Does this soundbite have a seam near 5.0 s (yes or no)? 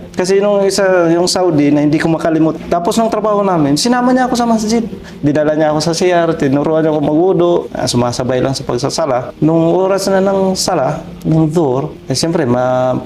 yes